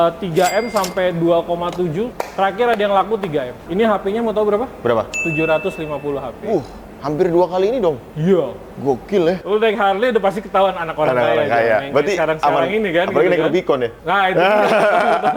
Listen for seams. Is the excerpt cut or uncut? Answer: cut